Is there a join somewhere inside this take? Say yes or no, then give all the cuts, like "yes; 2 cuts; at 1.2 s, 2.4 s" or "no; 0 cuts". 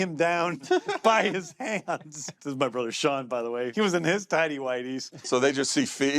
yes; 3 cuts; at 2.4 s, 3.7 s, 5.2 s